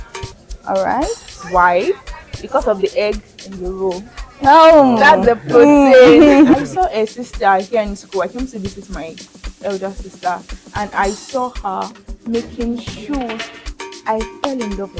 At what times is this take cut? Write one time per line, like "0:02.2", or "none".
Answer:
0:06.5